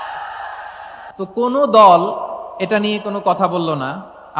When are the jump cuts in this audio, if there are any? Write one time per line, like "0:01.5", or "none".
0:01.0